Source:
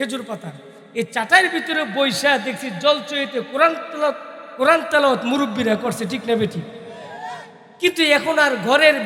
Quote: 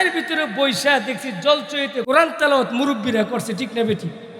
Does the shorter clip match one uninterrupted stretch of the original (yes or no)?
no